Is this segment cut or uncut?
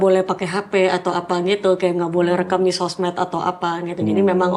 uncut